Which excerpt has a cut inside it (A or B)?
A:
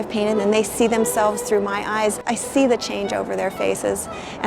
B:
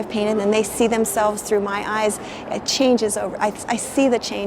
A